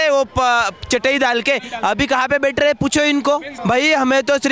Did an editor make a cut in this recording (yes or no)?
yes